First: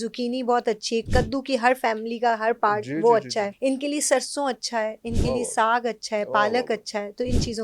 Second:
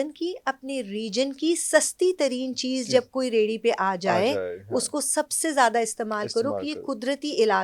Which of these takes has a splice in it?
first; 2 cuts; at 1.1 s, 3.5 s

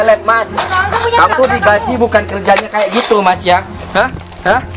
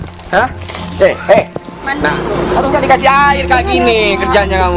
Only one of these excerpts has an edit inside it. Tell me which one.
first; 1 cut; at 1.3 s

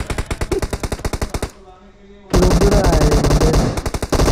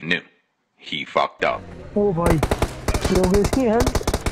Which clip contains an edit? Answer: second; 1 cut; at 1.7 s

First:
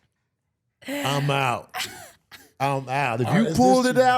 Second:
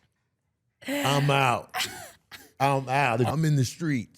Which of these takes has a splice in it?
second; 1 cut; at 3.3 s

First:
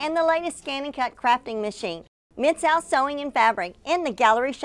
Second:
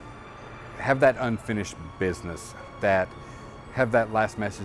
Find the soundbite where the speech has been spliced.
second; 1 cut; at 2.6 s

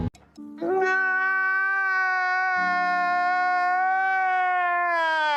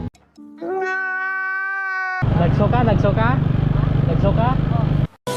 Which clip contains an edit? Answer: second; 1 cut; at 2.2 s

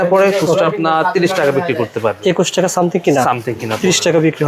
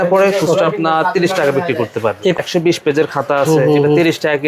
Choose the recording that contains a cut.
second; 1 cut; at 2.2 s

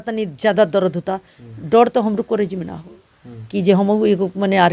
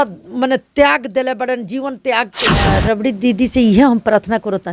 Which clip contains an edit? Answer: second; 1 cut; at 2.8 s

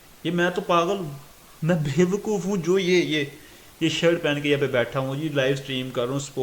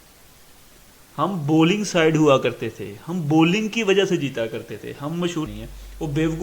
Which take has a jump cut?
second; 1 cut; at 5.5 s

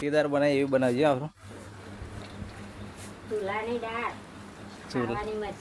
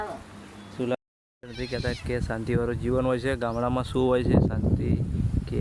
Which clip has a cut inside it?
second; 1 cut; at 0.9 s

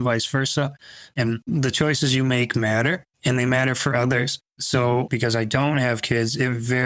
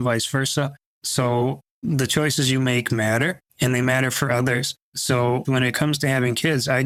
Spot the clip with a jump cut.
first; 2 cuts; at 1.2 s, 5.1 s

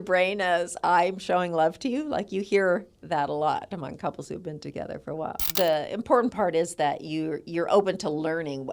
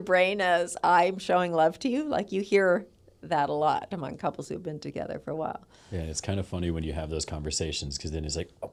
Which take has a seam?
first; 2 cuts; at 2.9 s, 5.4 s

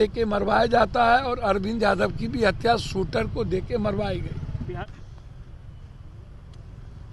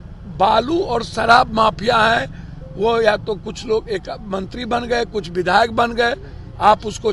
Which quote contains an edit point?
first; 1 cut; at 4.8 s

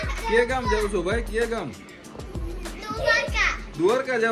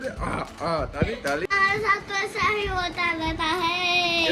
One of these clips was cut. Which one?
second; 1 cut; at 1.5 s

